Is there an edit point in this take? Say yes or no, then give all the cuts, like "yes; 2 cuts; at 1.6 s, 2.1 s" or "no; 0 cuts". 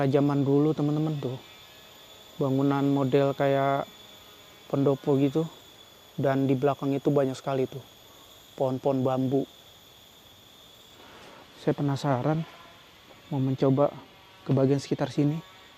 yes; 1 cut; at 11.0 s